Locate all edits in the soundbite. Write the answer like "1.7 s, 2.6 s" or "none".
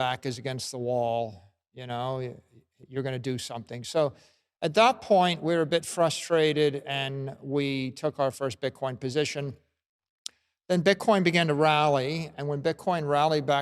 9.7 s